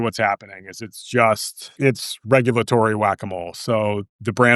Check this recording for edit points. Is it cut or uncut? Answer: cut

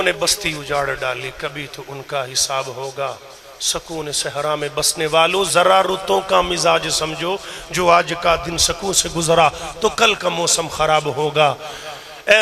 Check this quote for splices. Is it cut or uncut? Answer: uncut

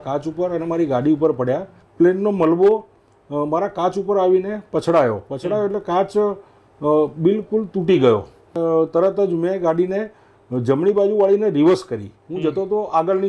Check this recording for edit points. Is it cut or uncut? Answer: cut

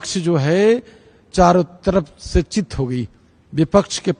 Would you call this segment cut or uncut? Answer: uncut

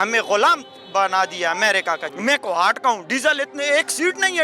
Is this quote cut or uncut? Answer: cut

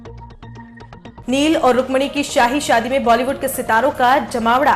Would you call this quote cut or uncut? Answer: uncut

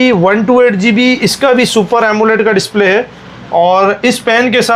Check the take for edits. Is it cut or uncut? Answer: uncut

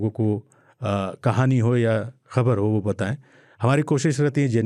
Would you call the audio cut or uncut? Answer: uncut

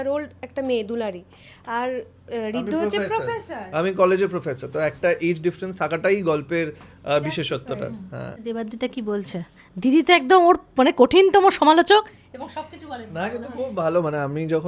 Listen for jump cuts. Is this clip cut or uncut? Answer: cut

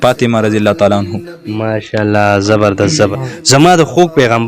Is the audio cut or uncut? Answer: cut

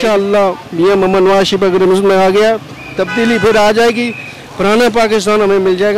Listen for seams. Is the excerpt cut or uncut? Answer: uncut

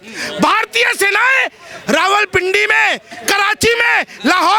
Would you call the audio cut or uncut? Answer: uncut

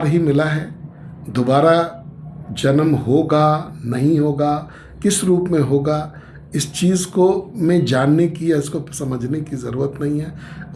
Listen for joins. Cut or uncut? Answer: uncut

